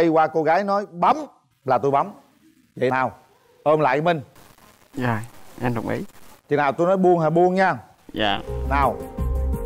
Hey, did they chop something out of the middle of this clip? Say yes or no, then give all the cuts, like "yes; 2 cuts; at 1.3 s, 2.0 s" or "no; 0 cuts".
no; 0 cuts